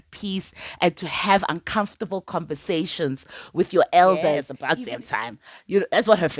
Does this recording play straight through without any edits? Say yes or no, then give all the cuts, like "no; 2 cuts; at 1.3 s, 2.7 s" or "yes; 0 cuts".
no; 1 cut; at 4.5 s